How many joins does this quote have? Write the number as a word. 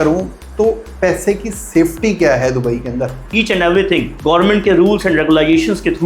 one